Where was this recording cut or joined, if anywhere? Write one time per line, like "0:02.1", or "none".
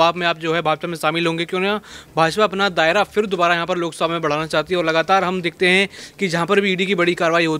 none